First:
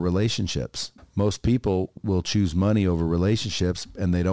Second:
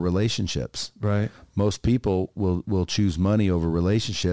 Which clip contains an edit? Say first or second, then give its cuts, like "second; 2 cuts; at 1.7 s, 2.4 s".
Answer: first; 2 cuts; at 0.9 s, 2.0 s